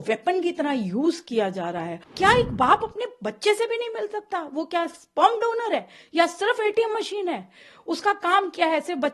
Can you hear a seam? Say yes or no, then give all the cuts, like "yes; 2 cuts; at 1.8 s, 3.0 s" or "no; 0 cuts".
yes; 1 cut; at 2.0 s